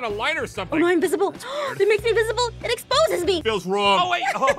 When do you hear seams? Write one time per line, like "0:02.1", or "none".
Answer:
0:03.4